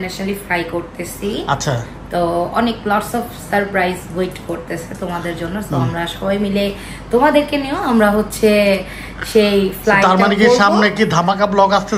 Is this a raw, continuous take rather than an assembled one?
yes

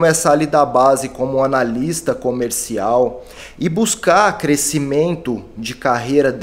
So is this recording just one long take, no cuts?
yes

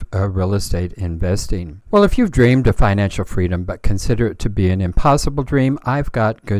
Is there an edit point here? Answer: yes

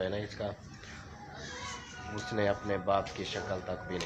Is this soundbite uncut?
yes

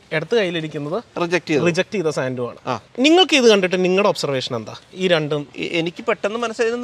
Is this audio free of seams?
no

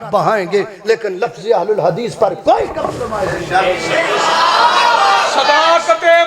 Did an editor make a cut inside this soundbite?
yes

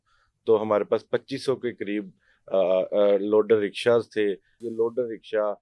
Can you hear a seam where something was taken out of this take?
yes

